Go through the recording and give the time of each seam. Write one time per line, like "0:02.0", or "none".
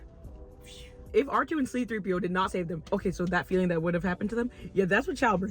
0:01.0
0:02.8